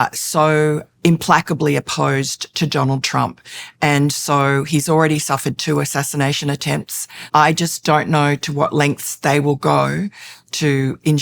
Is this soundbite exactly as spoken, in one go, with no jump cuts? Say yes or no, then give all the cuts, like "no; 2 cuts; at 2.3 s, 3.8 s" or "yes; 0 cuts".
no; 2 cuts; at 0.9 s, 7.2 s